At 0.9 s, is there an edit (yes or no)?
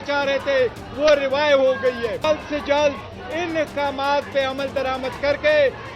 no